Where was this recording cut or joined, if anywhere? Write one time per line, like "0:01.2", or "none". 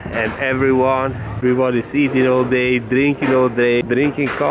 none